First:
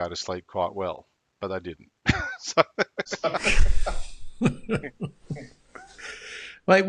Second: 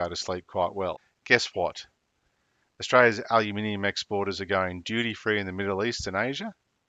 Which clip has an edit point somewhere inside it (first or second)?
second